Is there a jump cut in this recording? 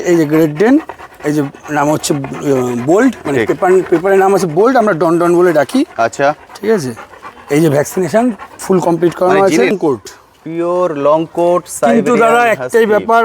yes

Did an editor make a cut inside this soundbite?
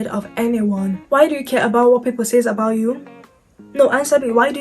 yes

